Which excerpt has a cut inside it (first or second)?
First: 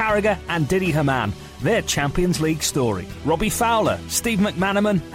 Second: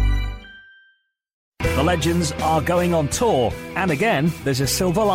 second